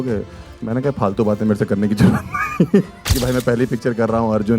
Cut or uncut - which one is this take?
cut